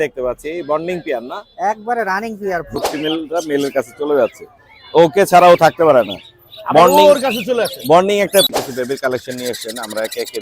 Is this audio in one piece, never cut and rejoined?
no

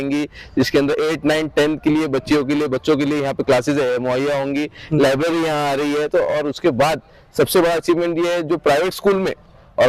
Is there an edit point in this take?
no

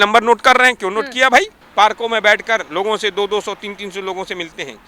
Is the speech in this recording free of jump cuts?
no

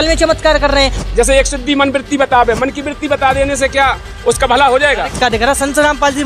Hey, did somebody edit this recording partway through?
yes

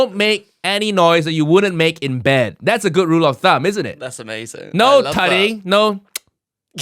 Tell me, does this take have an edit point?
no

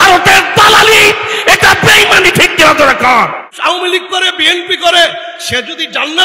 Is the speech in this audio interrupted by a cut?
yes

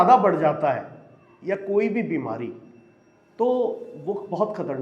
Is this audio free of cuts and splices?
no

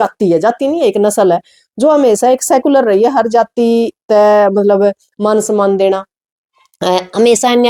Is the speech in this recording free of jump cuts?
yes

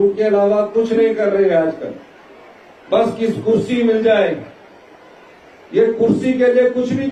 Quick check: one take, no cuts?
yes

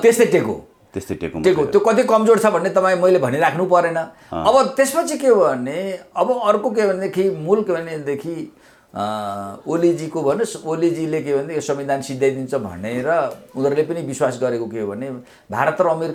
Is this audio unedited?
yes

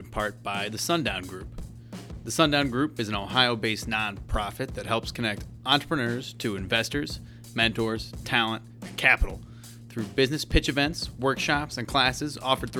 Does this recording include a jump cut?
no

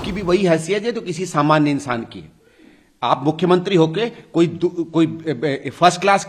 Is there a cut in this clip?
no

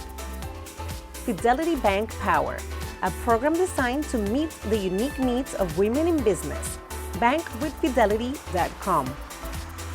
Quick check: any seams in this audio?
yes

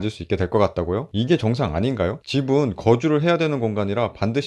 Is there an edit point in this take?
yes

